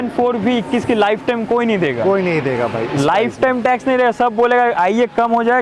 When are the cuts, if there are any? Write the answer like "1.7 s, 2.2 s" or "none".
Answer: none